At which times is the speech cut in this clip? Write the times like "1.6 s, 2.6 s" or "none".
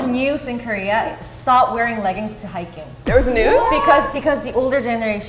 4.1 s